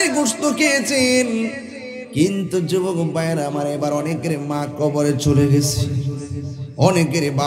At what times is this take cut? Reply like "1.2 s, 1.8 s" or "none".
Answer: none